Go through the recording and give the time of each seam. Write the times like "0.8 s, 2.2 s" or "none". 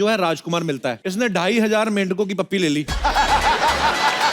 1.0 s

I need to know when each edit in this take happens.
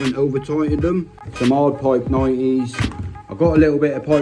1.2 s

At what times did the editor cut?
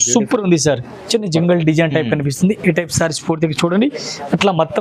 0.9 s

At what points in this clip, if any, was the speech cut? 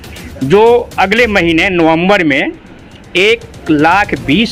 none

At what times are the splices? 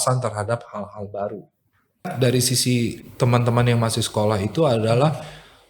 2.1 s

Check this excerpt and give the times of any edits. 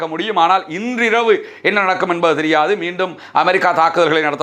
none

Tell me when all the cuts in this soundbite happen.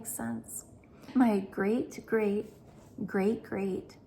1.0 s

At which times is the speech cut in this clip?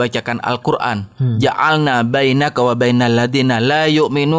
none

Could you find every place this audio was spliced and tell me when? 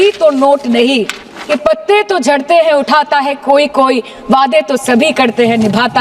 1.6 s

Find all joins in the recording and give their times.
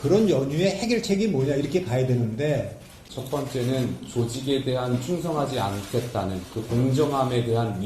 3.1 s

